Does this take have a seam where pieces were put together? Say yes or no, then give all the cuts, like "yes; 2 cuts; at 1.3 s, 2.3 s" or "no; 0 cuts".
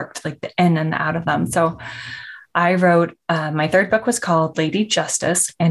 no; 0 cuts